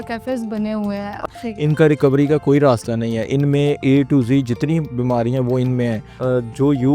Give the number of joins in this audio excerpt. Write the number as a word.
two